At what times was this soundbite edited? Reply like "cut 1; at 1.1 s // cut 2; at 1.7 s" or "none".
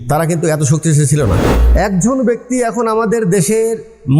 cut 1; at 1.5 s